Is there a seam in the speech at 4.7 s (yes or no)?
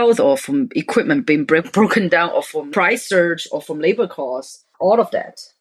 yes